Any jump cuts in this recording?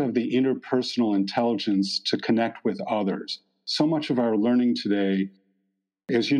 no; 0 cuts

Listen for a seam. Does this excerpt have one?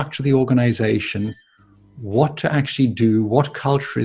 no; 0 cuts

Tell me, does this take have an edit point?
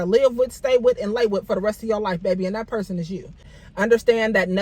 yes; 1 cut; at 3.5 s

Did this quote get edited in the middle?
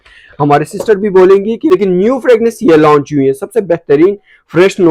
yes; 1 cut; at 1.6 s

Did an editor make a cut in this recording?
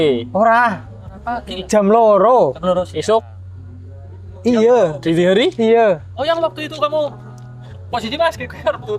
no; 0 cuts

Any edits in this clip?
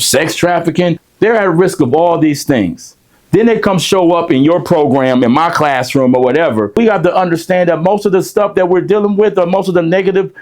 yes; 2 cuts; at 1.0 s, 6.8 s

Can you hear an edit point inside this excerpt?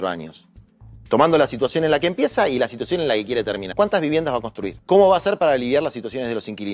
yes; 2 cuts; at 3.7 s, 4.7 s

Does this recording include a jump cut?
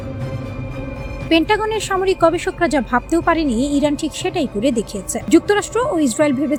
no; 0 cuts

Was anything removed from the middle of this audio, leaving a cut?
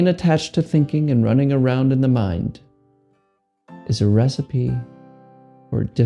no; 0 cuts

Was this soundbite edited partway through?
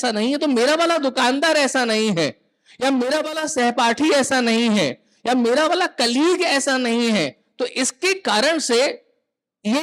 no; 0 cuts

